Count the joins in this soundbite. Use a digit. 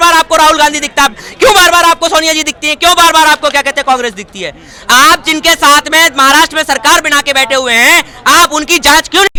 0